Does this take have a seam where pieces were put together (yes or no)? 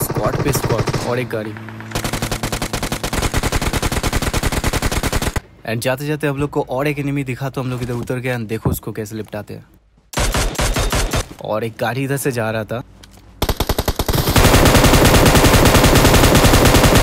yes